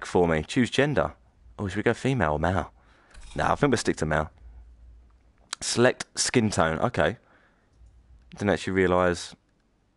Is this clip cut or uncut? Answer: uncut